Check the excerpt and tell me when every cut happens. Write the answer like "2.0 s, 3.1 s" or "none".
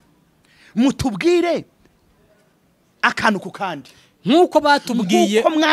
none